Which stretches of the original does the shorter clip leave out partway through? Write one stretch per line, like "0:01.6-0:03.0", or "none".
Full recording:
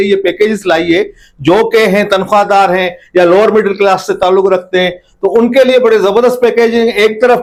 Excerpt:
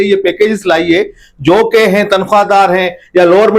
none